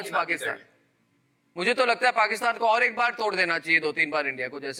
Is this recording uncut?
yes; 0 cuts

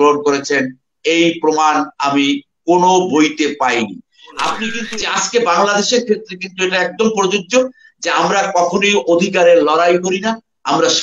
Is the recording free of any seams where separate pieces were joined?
no; 1 cut; at 4.8 s

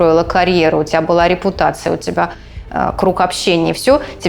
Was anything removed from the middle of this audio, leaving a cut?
no; 0 cuts

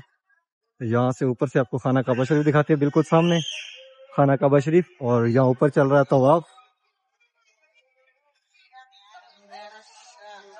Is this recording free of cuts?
yes; 0 cuts

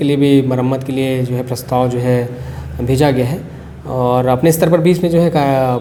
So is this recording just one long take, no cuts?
yes; 0 cuts

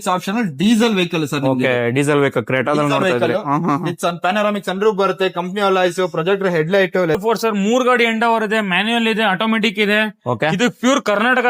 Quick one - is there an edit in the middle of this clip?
yes; 1 cut; at 7.2 s

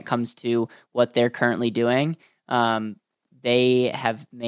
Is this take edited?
no; 0 cuts

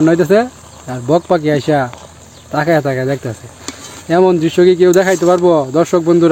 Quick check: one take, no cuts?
yes; 0 cuts

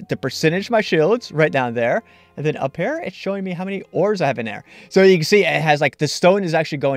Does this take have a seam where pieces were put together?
no; 0 cuts

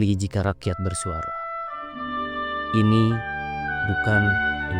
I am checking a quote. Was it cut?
no; 0 cuts

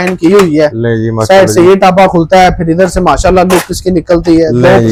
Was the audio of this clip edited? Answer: no; 0 cuts

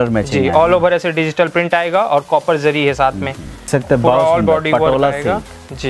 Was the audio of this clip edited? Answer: yes; 1 cut; at 3.7 s

